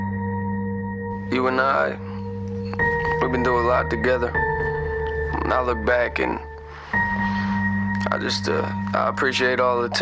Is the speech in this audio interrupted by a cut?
no; 0 cuts

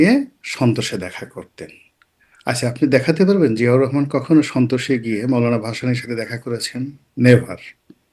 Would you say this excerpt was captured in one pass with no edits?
yes; 0 cuts

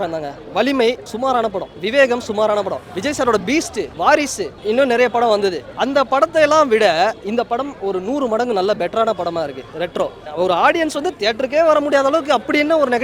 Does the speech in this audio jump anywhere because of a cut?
yes; 6 cuts; at 1.4 s, 2.9 s, 3.9 s, 4.6 s, 5.7 s, 10.3 s

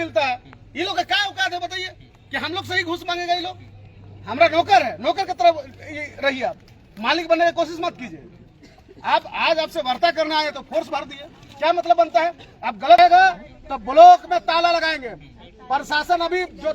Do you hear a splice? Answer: yes; 1 cut; at 13.0 s

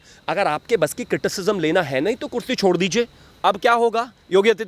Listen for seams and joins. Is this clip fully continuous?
no; 1 cut; at 3.3 s

